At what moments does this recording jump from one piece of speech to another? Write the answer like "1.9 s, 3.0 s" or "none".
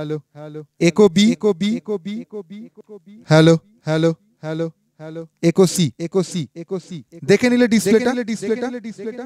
none

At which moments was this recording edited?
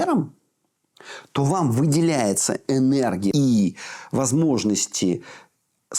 3.3 s

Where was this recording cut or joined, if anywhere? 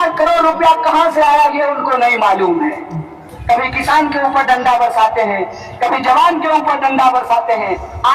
3.3 s

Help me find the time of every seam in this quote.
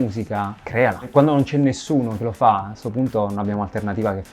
1.0 s

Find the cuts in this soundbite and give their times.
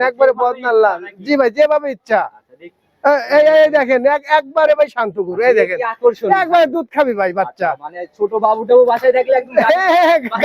none

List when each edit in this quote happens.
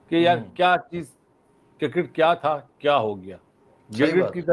none

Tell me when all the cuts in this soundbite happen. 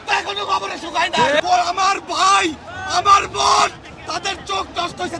1.4 s

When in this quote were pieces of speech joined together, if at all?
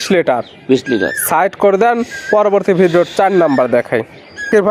none

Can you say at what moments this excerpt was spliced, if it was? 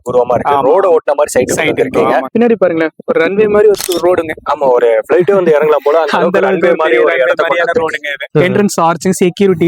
2.3 s, 8.2 s

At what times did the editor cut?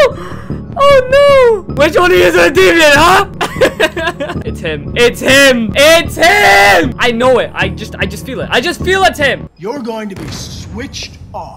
1.7 s, 3.3 s, 4.4 s, 5.7 s, 7.0 s, 9.5 s

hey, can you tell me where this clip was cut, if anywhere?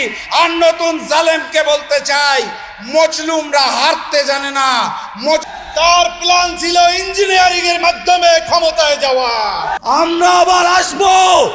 5.5 s, 9.7 s

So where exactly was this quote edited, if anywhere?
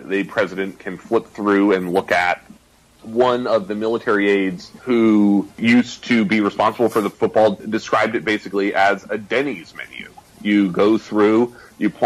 4.7 s, 5.5 s, 7.1 s

